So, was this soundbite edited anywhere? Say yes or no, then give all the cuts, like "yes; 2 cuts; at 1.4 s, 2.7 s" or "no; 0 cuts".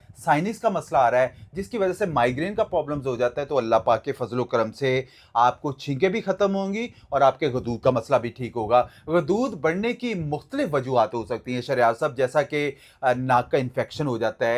no; 0 cuts